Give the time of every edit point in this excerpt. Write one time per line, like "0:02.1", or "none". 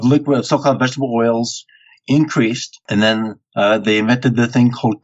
0:02.7